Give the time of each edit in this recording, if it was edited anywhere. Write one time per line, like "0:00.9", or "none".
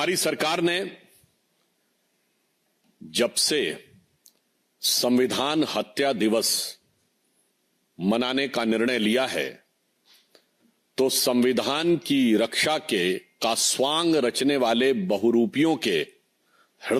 none